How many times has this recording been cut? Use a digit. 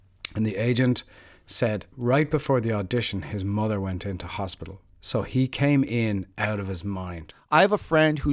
1